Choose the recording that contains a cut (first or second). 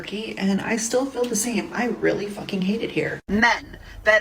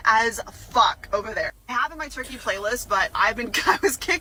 first